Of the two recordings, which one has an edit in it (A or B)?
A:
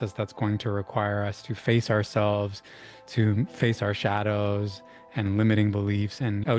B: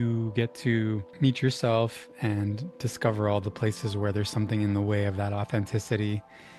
B